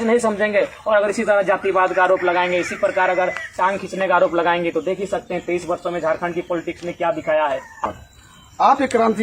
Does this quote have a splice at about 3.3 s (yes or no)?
no